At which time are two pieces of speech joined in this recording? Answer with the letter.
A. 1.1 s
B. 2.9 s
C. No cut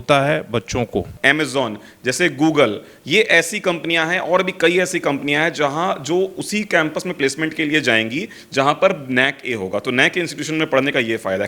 A